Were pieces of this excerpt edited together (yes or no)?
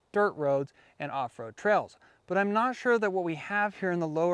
no